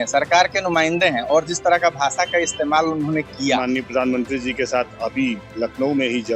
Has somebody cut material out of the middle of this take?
yes; 1 cut; at 3.6 s

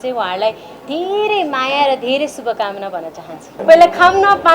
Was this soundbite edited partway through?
yes; 1 cut; at 3.5 s

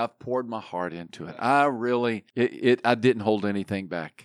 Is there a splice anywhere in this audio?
yes; 1 cut; at 2.2 s

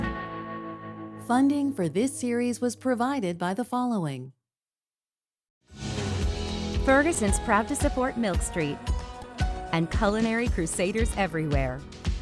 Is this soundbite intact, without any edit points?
no; 1 cut; at 1.2 s

